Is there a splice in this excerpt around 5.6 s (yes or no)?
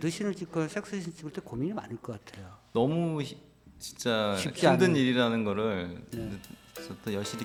no